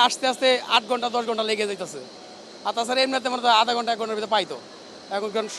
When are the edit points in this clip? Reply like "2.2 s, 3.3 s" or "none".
none